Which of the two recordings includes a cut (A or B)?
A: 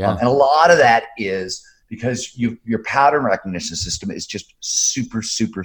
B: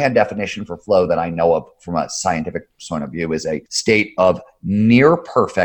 B